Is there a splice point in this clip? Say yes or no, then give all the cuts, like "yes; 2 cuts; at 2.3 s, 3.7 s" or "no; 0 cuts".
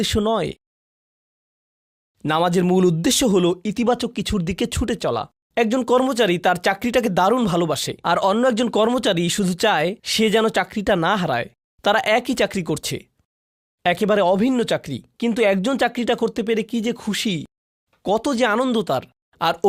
yes; 1 cut; at 5.4 s